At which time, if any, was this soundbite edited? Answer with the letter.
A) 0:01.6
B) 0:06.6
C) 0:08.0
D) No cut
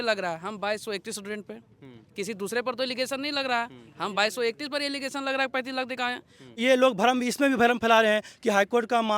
B